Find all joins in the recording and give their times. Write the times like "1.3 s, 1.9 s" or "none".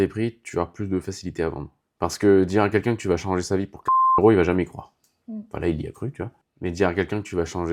none